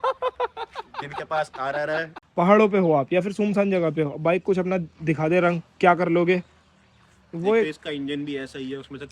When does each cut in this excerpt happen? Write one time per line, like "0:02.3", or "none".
0:02.2